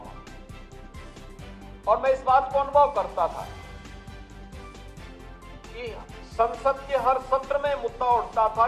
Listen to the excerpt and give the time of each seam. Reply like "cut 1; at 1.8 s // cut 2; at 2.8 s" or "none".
cut 1; at 4.0 s // cut 2; at 5.7 s